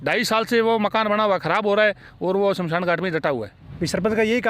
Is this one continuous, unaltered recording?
no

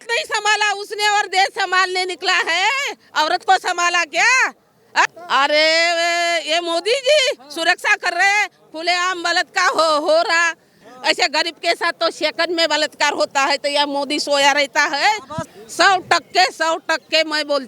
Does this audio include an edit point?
yes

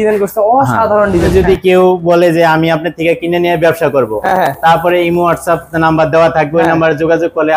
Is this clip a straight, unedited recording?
no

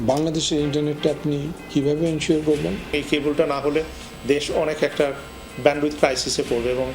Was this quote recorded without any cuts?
no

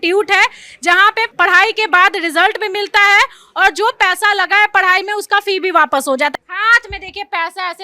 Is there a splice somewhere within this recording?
yes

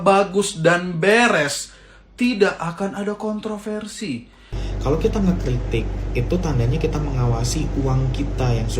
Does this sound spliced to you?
yes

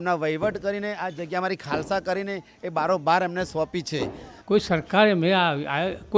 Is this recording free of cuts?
no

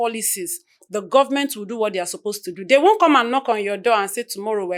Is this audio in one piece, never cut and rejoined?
yes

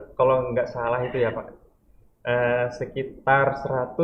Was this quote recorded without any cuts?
yes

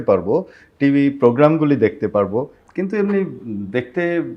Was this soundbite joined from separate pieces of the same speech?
yes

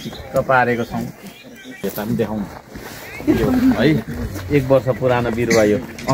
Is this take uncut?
no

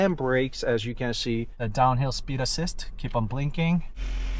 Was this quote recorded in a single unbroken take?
no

